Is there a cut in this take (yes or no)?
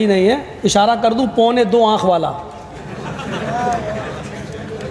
no